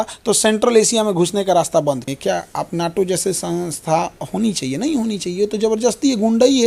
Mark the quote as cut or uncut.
cut